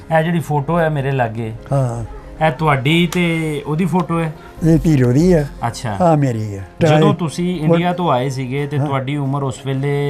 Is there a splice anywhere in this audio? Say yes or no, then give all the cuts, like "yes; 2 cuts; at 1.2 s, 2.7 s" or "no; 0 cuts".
yes; 1 cut; at 6.8 s